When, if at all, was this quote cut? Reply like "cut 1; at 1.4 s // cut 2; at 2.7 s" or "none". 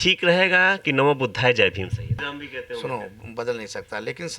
cut 1; at 2.2 s